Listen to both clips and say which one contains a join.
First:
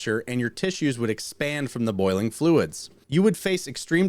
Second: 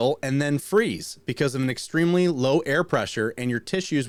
first; 1 cut; at 2.9 s

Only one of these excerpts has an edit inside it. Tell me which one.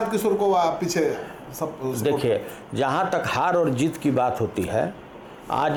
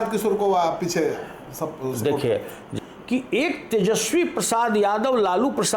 second; 1 cut; at 2.7 s

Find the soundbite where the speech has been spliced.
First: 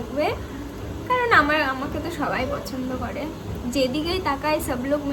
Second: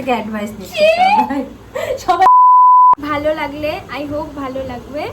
second; 2 cuts; at 2.3 s, 3.0 s

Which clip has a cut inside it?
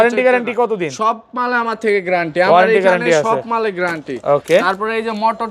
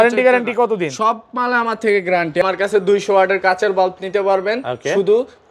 second; 1 cut; at 2.4 s

